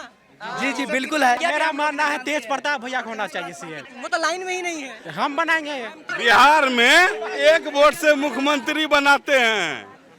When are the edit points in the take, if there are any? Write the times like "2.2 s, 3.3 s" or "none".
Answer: 1.4 s, 3.8 s, 5.0 s, 6.1 s